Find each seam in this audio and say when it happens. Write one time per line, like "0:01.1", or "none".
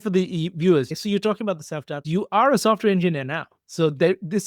0:00.9
0:02.0